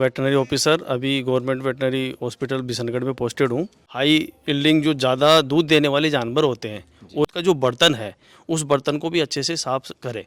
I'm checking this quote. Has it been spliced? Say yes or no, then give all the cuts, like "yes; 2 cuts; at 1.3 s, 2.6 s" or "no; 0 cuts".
yes; 2 cuts; at 3.8 s, 7.3 s